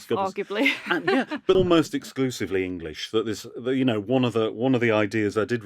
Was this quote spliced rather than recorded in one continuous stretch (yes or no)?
yes